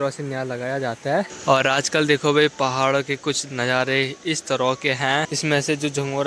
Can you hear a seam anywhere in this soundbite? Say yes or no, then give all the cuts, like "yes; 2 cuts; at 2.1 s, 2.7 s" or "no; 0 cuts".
yes; 2 cuts; at 1.3 s, 5.3 s